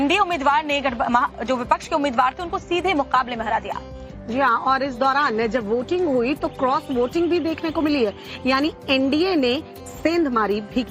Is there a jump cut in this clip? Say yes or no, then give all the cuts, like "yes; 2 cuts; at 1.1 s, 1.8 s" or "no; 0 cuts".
yes; 1 cut; at 5.8 s